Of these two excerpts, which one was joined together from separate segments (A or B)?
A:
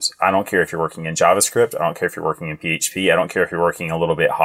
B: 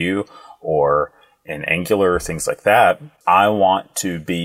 B